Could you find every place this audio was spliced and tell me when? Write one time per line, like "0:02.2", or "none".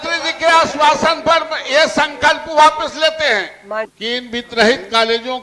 0:03.9